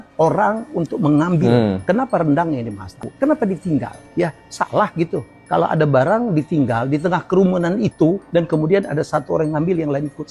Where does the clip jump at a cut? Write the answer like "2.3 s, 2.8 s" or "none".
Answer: 3.1 s